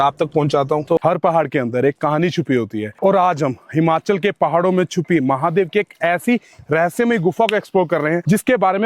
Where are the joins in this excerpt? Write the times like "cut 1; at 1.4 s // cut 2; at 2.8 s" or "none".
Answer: cut 1; at 1.0 s